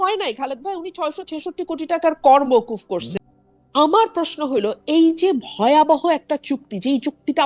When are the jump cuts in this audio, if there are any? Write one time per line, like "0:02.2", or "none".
0:03.1